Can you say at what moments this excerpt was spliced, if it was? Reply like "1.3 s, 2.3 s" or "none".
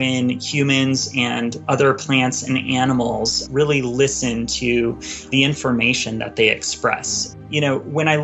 1.6 s, 3.4 s, 5.3 s, 7.2 s